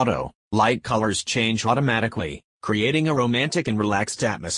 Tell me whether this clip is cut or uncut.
uncut